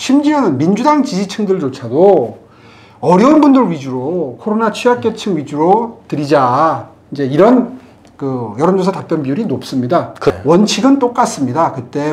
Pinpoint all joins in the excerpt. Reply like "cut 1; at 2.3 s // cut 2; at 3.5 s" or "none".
cut 1; at 10.3 s